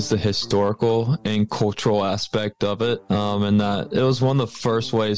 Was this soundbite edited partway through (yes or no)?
yes